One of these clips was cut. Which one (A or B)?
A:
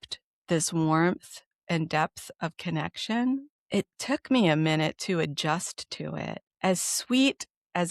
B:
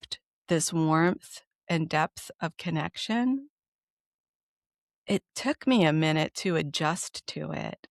A